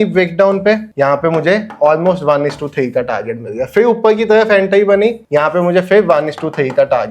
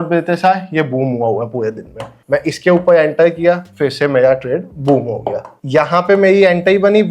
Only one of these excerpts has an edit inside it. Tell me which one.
second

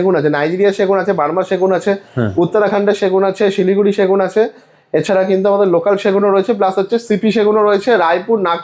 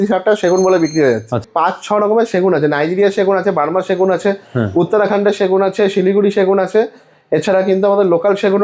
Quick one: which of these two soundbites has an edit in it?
second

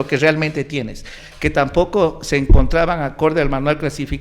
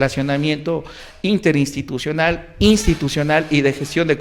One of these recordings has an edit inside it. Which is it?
first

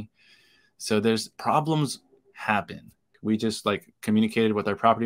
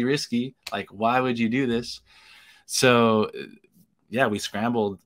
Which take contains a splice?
first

